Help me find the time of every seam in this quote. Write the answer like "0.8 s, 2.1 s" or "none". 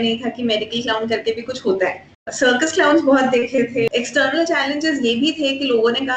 3.9 s